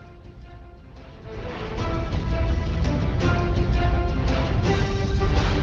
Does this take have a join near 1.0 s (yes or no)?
yes